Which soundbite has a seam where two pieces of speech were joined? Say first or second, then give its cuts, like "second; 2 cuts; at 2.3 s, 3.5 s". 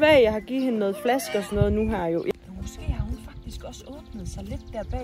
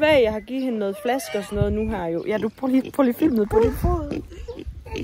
first; 1 cut; at 2.3 s